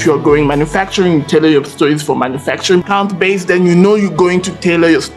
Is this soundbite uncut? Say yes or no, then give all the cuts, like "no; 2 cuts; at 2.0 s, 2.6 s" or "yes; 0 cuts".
no; 1 cut; at 2.8 s